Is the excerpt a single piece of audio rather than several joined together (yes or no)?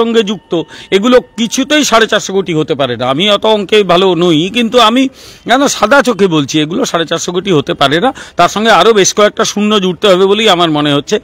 yes